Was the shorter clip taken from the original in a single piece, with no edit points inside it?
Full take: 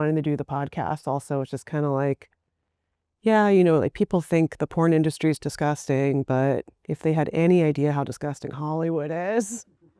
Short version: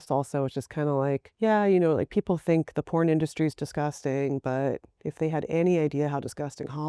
no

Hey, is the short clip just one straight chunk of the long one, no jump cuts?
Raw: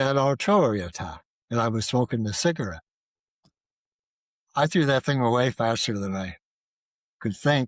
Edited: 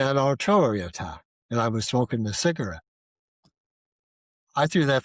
yes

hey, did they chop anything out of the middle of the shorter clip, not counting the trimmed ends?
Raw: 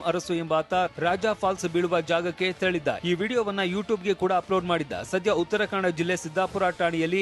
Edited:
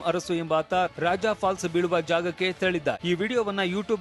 no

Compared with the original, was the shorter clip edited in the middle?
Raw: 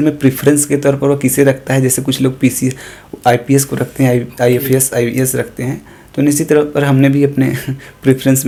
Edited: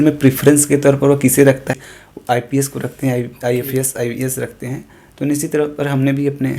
yes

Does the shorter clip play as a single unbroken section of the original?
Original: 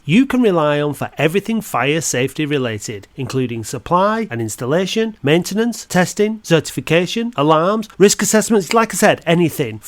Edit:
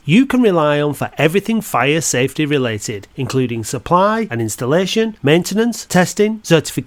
yes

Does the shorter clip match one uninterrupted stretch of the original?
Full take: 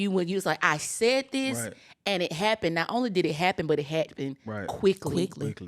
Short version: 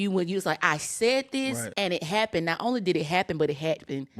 no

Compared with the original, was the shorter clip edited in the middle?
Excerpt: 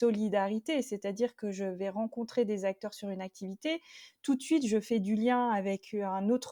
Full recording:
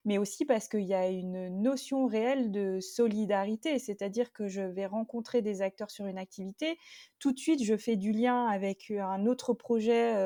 no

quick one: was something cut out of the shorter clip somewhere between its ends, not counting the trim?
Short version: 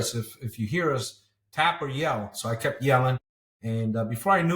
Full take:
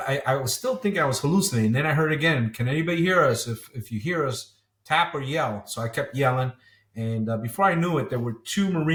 no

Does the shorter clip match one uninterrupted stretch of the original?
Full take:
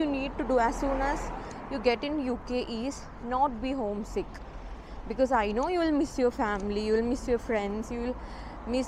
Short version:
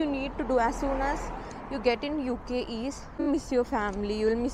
no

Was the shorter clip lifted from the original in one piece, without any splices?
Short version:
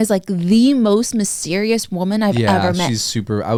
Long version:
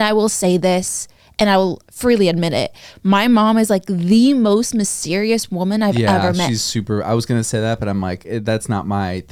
yes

